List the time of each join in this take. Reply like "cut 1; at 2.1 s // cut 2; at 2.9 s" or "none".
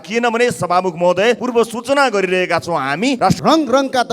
cut 1; at 1.4 s // cut 2; at 3.2 s